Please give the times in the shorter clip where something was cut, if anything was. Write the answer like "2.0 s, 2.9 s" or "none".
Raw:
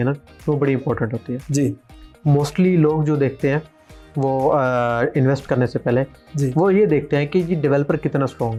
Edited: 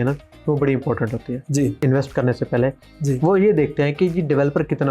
1.8 s